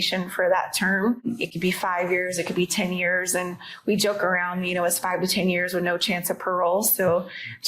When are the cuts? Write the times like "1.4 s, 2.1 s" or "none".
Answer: 1.3 s